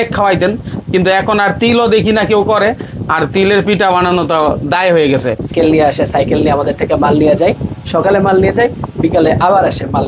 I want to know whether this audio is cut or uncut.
uncut